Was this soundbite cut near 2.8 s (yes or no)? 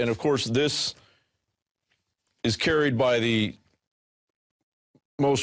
yes